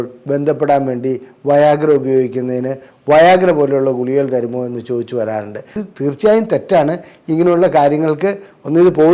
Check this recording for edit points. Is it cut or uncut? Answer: cut